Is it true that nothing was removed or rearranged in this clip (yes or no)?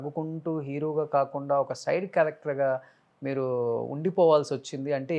yes